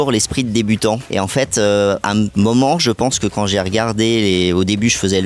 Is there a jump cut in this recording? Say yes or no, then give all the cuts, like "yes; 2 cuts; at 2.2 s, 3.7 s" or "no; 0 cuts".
yes; 2 cuts; at 1.0 s, 2.1 s